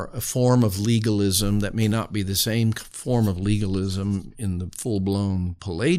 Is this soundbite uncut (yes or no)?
yes